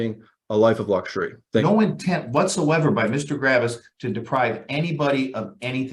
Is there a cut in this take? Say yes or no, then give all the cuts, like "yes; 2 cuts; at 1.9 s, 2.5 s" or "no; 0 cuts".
yes; 1 cut; at 1.6 s